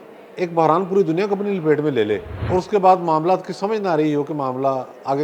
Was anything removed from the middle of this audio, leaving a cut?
yes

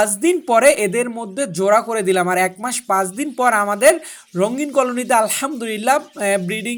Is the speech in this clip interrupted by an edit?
no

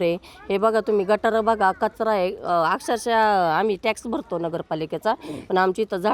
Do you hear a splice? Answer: no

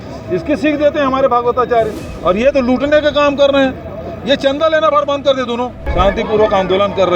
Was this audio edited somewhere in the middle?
yes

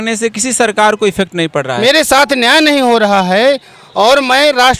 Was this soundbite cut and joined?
yes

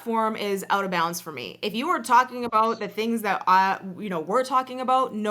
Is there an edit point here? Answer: no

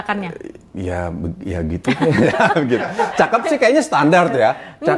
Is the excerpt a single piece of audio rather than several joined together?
yes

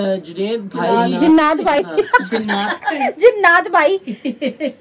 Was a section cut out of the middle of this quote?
yes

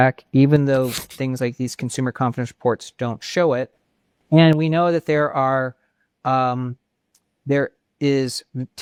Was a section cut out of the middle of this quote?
no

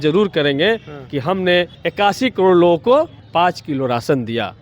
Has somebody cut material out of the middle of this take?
yes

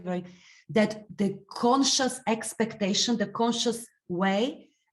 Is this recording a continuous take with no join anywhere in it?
no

